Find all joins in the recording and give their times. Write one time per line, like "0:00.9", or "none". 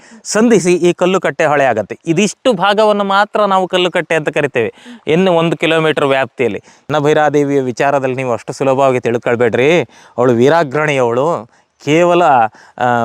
0:06.9